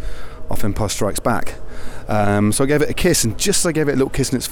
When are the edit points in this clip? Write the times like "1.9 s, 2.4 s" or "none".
none